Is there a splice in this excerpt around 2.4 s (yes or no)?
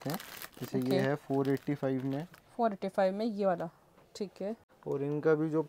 no